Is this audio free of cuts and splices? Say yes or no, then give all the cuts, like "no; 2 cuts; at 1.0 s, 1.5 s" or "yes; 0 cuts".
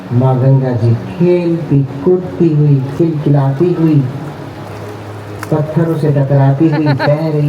yes; 0 cuts